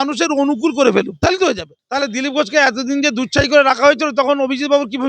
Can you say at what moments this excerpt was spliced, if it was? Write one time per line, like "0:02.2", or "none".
0:01.7